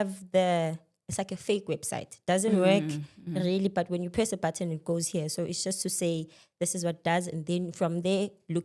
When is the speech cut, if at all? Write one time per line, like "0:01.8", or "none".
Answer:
none

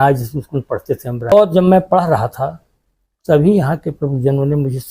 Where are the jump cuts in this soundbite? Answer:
0:01.3

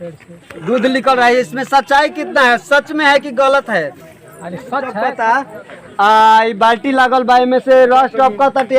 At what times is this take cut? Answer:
0:05.1

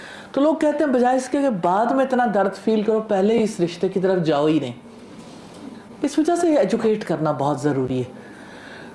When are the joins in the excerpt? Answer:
none

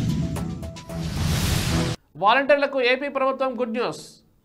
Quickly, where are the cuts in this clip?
0:02.0

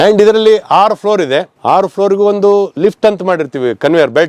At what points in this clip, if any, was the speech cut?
0:01.5

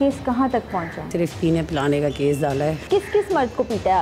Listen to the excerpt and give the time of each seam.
0:01.1
0:02.8

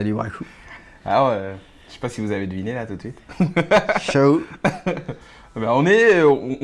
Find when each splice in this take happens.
0:04.3

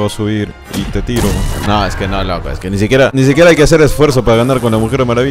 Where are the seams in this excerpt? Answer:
0:01.6
0:03.1

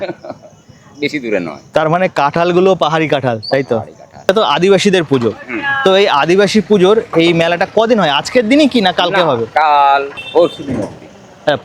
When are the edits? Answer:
0:04.3
0:10.2

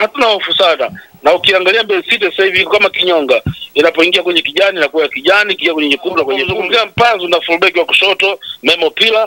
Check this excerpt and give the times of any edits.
0:06.4

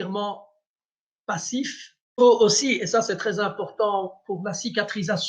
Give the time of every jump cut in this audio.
0:02.1

